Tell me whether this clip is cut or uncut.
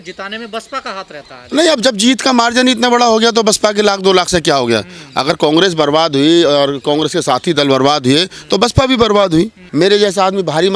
cut